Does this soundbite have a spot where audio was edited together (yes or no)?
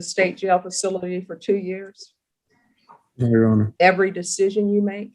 yes